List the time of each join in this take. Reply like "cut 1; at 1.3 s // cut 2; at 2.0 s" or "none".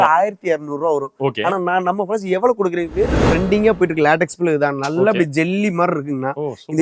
cut 1; at 3.2 s